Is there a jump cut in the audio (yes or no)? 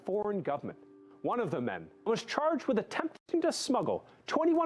yes